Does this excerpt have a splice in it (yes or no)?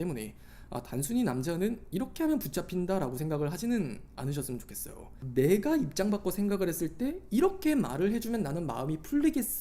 yes